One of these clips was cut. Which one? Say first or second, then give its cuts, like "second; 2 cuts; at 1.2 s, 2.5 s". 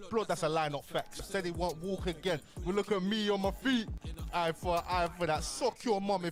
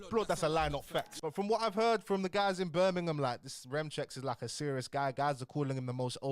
second; 1 cut; at 1.1 s